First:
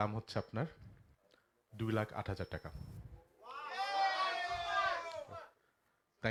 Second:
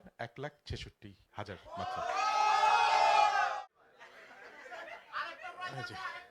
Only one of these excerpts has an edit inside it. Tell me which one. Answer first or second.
second